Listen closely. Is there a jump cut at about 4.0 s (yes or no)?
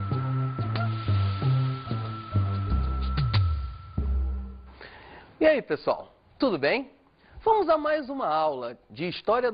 no